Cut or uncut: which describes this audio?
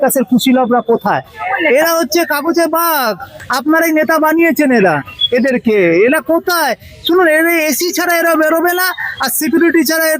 cut